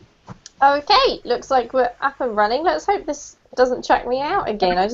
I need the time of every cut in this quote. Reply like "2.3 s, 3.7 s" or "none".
none

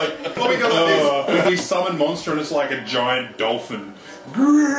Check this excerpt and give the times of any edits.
1.5 s

